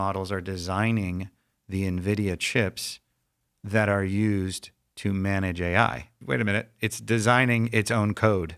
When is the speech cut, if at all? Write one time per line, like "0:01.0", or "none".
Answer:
0:06.1